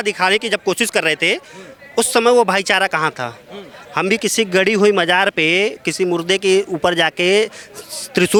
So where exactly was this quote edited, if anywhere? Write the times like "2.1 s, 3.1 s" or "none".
none